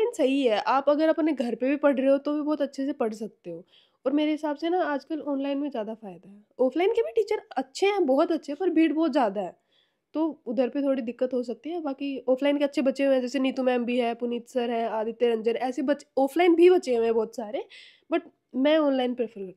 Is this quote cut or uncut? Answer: uncut